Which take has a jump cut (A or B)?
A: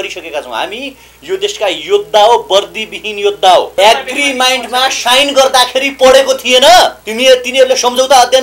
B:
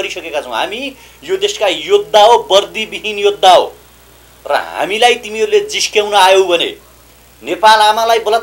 A